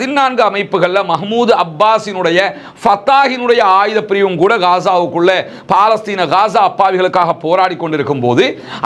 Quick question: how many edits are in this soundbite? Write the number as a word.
zero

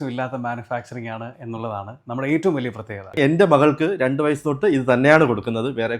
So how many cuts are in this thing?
one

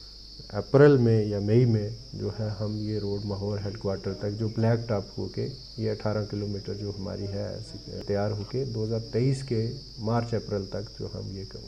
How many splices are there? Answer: one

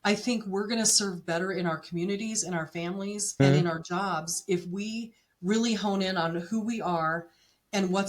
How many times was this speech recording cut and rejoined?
one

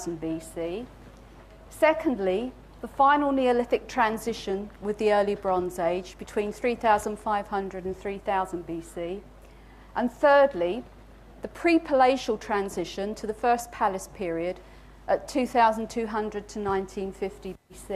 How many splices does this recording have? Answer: one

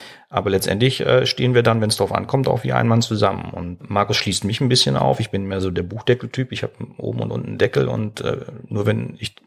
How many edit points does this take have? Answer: one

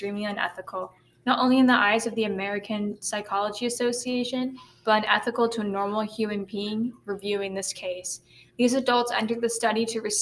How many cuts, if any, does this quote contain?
zero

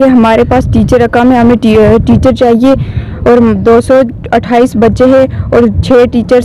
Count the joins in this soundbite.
zero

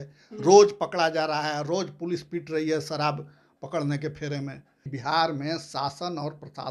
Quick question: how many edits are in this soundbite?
one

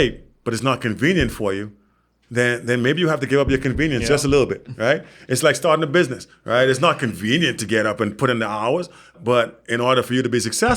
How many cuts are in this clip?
one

